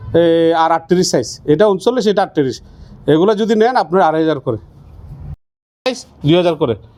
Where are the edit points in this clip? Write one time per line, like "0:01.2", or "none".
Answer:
none